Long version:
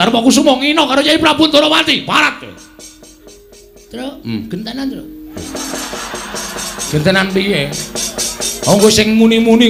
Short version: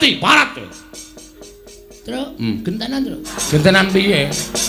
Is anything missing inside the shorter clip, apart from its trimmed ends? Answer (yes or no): yes